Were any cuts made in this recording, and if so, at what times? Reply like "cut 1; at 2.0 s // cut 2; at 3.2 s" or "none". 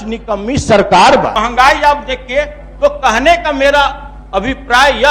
cut 1; at 1.3 s